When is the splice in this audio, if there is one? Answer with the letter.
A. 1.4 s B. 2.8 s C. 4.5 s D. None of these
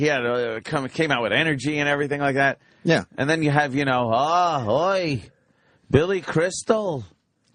D